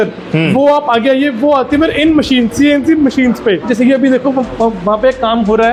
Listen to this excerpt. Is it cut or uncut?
uncut